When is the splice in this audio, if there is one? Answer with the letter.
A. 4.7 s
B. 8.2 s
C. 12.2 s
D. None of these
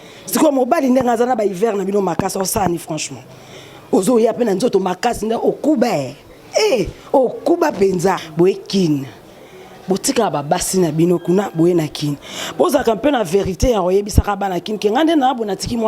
B